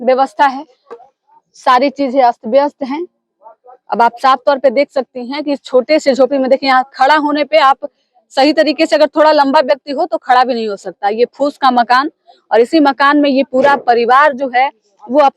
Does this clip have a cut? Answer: no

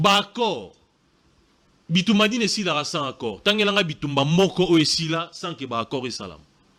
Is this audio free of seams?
yes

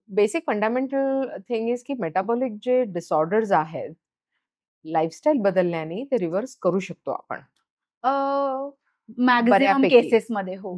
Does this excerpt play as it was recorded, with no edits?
yes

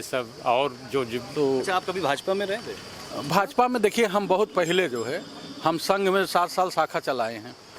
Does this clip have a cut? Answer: yes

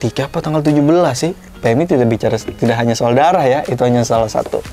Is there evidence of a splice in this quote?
yes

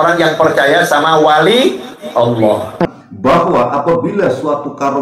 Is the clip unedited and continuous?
no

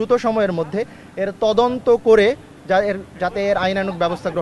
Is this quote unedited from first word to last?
yes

